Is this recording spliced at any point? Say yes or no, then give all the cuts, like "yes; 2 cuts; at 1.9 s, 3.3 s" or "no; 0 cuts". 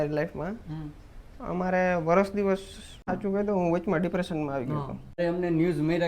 yes; 2 cuts; at 3.1 s, 5.2 s